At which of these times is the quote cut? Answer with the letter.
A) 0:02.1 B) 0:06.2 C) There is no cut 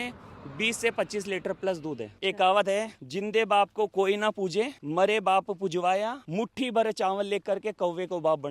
A